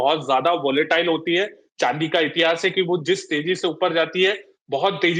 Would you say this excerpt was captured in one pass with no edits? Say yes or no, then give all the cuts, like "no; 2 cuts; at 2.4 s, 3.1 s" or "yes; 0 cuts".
yes; 0 cuts